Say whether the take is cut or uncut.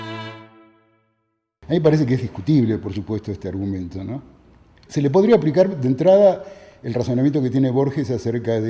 cut